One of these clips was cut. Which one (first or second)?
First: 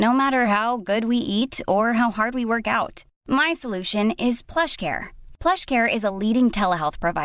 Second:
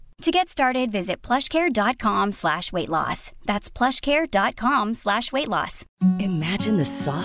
second